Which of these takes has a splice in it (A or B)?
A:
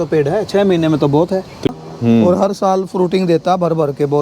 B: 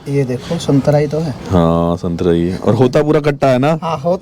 A